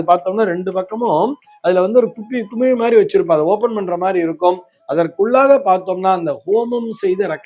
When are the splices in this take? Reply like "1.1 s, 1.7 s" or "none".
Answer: none